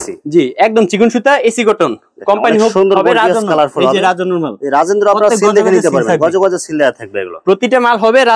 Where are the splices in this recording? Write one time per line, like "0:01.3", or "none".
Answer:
none